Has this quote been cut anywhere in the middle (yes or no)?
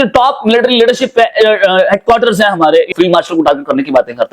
yes